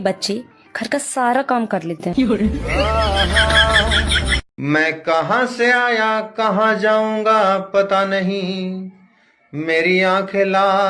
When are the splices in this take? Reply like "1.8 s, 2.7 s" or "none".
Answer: 4.4 s